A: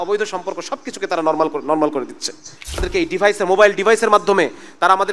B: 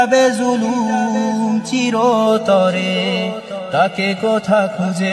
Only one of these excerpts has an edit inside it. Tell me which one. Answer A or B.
A